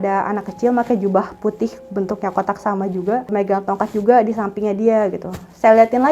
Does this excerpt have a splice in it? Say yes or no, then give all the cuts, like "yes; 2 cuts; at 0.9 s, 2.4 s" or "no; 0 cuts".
yes; 1 cut; at 3.3 s